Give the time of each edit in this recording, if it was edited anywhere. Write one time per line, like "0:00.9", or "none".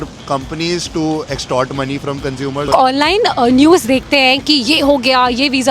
0:02.7